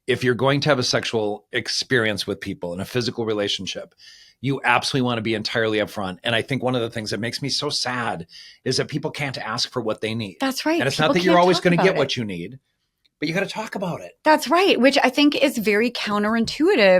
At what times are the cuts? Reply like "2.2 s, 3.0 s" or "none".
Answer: none